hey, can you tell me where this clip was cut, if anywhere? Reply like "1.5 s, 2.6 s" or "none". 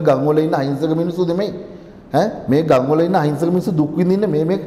none